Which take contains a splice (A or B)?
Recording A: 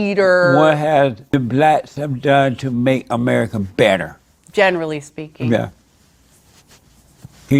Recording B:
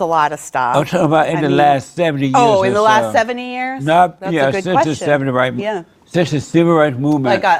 A